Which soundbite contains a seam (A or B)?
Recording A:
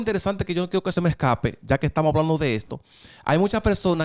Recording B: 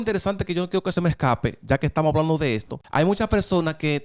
B